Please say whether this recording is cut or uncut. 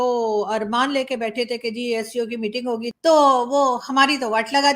cut